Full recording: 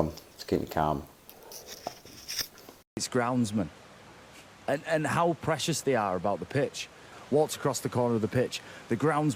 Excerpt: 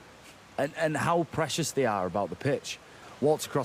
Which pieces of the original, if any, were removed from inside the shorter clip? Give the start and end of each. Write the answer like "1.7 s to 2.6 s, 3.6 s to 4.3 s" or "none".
none